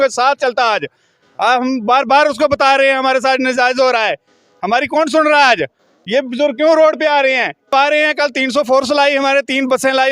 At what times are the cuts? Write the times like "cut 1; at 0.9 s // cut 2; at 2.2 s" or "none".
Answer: cut 1; at 7.7 s